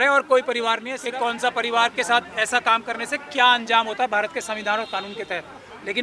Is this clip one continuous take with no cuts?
no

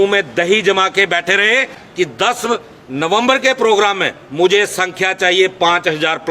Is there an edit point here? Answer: yes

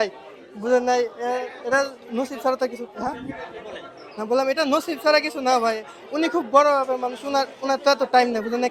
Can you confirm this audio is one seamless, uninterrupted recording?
yes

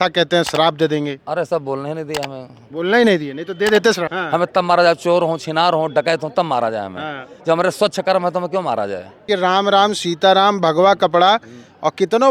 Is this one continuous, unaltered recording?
no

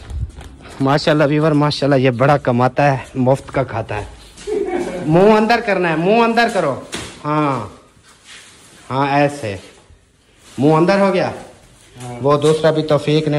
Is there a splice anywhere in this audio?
no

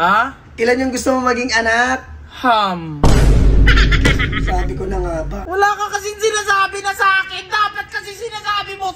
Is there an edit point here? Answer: yes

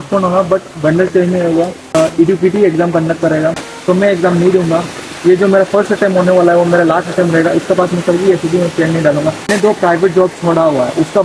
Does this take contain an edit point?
yes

